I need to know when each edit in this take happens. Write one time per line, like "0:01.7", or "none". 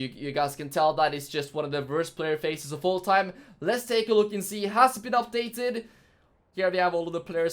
0:06.5